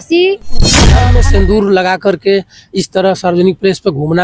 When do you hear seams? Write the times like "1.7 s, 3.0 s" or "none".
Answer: 0.9 s